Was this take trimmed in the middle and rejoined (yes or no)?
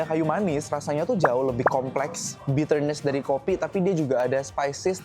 yes